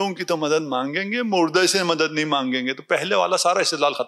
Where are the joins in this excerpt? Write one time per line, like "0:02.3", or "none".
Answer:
none